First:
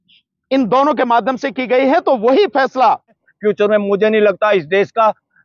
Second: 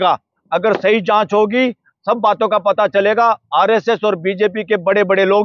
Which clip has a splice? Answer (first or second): first